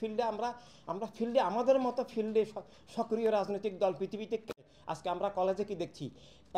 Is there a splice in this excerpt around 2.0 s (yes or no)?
no